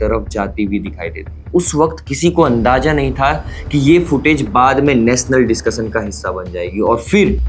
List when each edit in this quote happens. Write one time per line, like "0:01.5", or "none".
none